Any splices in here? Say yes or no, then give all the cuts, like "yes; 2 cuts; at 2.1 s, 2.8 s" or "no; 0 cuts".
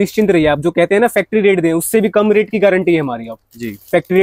no; 0 cuts